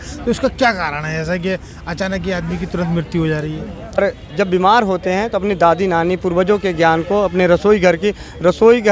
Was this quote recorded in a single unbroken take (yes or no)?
no